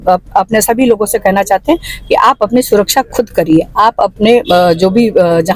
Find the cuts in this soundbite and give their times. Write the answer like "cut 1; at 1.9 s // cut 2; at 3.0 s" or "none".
none